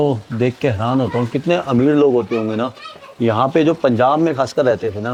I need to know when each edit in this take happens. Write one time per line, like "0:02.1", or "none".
none